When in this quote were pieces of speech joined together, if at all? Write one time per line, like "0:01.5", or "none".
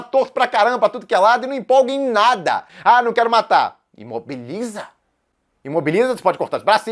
0:02.7